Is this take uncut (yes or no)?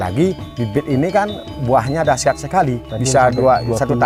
yes